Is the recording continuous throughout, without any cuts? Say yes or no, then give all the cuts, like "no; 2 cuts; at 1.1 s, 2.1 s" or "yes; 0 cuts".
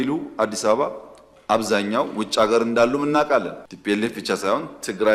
no; 1 cut; at 3.7 s